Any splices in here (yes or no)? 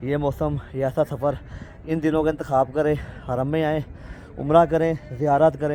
no